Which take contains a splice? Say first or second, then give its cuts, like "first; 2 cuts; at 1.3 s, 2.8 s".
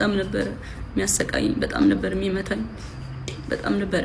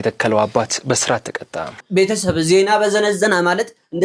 second; 1 cut; at 1.8 s